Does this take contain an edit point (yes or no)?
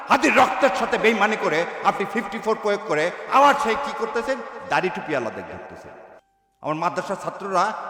no